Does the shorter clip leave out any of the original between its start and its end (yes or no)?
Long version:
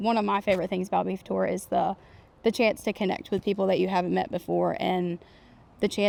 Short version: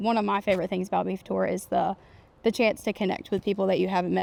no